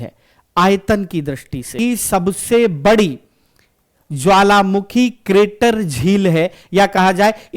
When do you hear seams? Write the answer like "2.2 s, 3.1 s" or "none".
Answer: 1.7 s